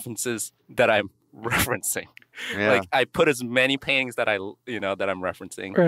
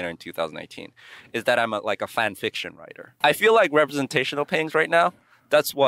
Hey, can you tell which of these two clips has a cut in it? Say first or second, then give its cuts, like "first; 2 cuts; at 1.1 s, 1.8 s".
second; 1 cut; at 3.1 s